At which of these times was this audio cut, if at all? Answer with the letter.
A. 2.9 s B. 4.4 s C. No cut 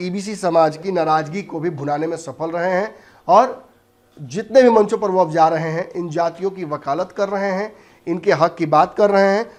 C